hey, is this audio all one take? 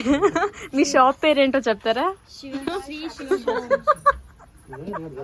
yes; 0 cuts

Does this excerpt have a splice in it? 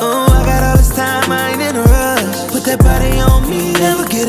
no; 0 cuts

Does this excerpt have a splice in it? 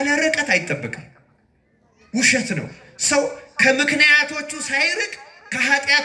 no; 0 cuts

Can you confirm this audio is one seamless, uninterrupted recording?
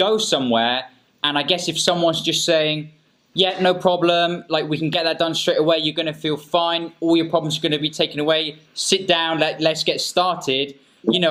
yes; 0 cuts

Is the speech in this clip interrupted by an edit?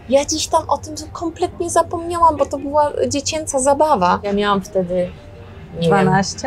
yes; 1 cut; at 4.3 s

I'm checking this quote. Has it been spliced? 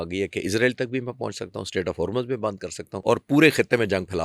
yes; 1 cut; at 2.9 s

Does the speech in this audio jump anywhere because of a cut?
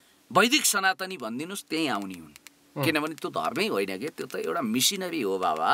no; 0 cuts

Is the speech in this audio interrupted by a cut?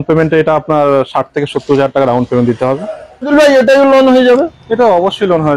yes; 1 cut; at 3.3 s

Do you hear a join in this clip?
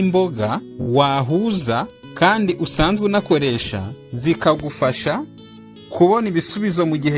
no; 0 cuts

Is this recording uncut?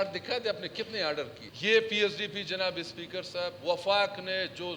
no; 1 cut; at 1.4 s

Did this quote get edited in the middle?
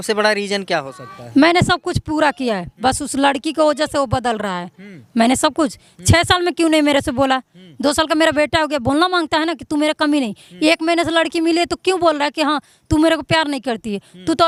no; 0 cuts

